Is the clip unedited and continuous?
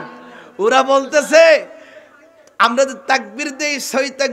yes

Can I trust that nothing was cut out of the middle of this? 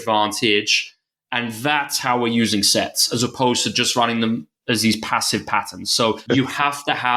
no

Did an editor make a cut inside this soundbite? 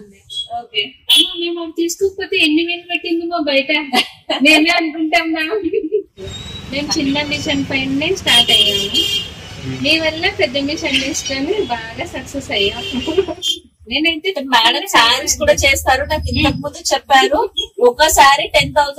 yes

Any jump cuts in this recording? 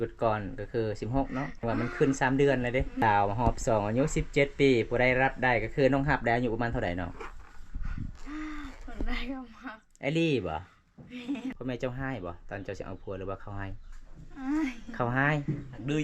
yes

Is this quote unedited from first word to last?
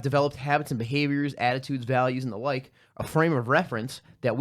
yes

